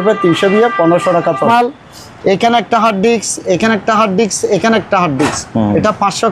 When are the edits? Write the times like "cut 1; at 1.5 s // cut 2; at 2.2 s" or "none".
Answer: cut 1; at 1.4 s